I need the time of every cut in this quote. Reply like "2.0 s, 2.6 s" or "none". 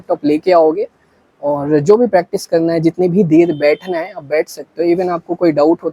none